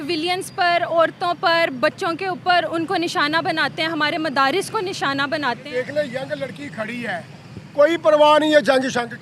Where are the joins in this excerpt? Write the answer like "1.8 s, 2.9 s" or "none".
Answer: 5.6 s